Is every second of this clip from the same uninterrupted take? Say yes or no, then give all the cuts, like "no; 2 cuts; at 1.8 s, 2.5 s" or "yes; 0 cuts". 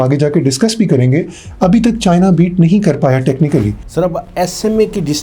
no; 1 cut; at 3.8 s